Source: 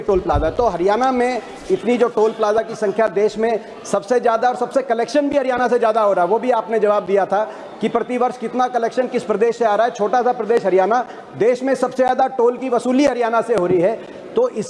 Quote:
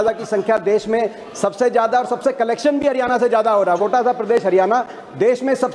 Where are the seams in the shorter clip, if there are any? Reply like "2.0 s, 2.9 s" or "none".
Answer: 3.8 s